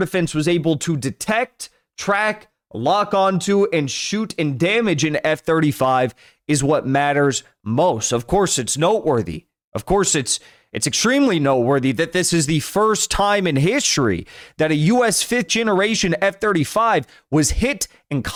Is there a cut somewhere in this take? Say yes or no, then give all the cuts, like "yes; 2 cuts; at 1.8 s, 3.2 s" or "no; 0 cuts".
no; 0 cuts